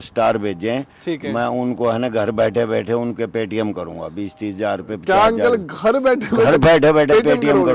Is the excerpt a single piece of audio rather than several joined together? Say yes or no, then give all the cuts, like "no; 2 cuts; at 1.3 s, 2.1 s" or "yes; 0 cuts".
yes; 0 cuts